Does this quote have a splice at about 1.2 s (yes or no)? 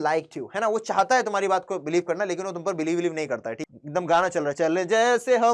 no